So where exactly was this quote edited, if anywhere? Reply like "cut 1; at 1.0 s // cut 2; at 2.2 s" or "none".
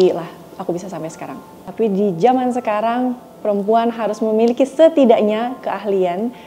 cut 1; at 1.5 s